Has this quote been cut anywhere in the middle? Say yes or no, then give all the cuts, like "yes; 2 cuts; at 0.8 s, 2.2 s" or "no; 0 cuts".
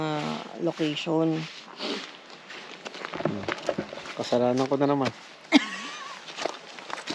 no; 0 cuts